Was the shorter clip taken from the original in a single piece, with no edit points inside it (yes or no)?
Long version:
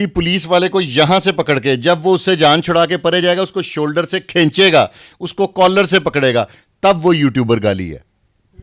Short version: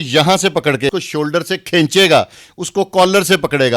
no